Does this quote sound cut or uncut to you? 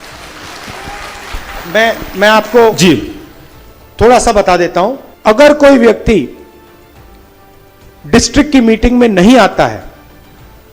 cut